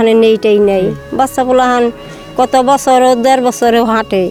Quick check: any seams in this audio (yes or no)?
no